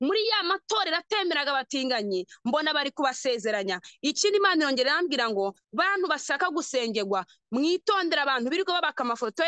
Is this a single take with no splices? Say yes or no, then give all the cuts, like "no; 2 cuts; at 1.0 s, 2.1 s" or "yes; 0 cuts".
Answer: no; 1 cut; at 3.9 s